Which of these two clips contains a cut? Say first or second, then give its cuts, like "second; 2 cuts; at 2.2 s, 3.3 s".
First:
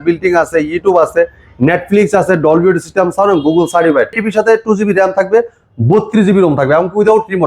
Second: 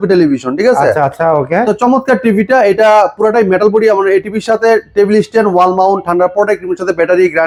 first; 1 cut; at 4.2 s